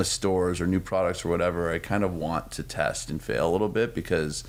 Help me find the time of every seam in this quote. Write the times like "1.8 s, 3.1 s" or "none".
none